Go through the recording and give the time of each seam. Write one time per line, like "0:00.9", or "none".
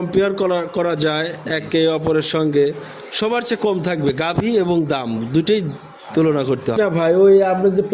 0:06.7